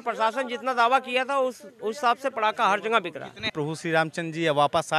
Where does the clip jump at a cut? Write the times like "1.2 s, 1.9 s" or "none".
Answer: 3.5 s